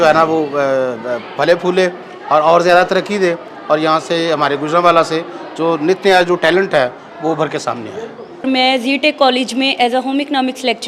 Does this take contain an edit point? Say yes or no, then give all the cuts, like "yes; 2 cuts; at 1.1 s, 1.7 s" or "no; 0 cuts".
no; 0 cuts